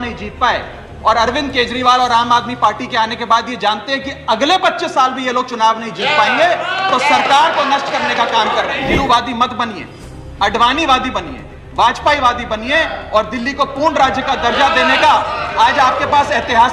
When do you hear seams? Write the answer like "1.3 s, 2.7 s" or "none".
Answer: 9.0 s